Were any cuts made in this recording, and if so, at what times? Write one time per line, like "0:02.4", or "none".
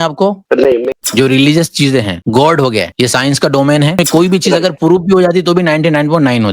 0:01.0
0:02.2
0:02.9
0:03.9